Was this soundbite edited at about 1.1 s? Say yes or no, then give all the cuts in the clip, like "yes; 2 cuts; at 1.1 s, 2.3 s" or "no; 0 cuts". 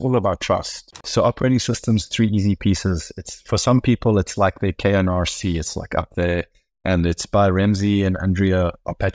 yes; 1 cut; at 1.1 s